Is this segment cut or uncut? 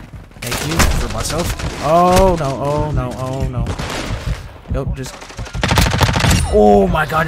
uncut